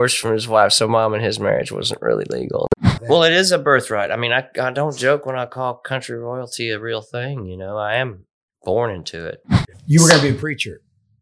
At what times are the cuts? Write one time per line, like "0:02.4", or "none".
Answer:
0:02.9
0:09.7